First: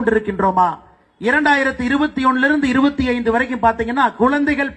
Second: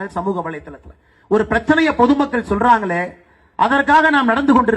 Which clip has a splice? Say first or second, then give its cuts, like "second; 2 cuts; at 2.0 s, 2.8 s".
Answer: second; 1 cut; at 2.9 s